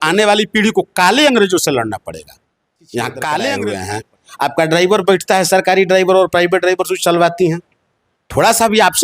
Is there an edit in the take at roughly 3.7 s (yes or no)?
yes